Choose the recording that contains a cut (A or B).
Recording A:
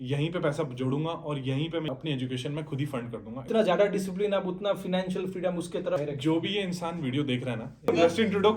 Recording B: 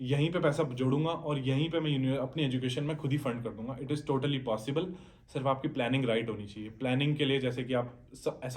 A